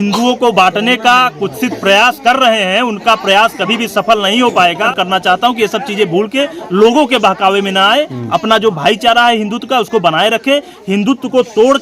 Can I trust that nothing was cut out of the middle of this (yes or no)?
no